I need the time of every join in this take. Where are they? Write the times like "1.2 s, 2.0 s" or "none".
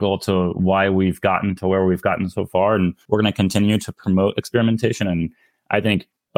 3.0 s